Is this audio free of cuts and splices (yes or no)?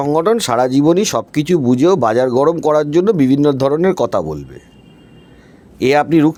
yes